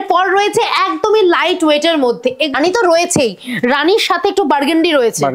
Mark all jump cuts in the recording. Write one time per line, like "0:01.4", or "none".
0:02.5